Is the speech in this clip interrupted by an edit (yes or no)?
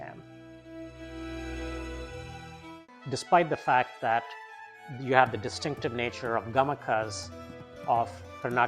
yes